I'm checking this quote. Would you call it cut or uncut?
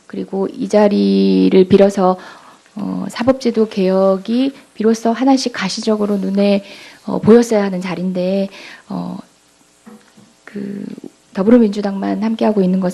uncut